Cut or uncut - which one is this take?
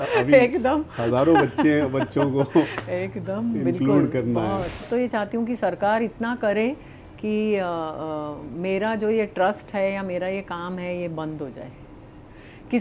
cut